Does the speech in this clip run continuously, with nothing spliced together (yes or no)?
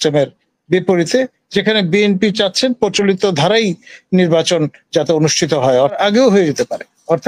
no